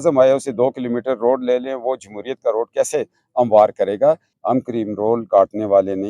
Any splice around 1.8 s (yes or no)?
no